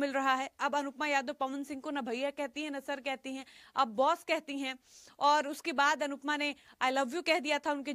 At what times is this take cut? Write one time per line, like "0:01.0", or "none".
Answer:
none